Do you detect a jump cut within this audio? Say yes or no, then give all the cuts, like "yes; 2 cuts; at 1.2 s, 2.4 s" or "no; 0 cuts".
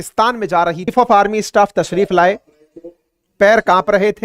yes; 1 cut; at 0.9 s